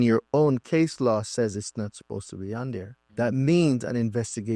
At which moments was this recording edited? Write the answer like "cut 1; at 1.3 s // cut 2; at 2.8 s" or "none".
cut 1; at 3.0 s